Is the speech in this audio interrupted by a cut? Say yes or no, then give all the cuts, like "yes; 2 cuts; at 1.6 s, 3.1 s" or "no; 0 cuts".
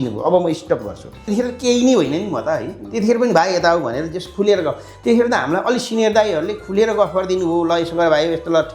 yes; 1 cut; at 1.2 s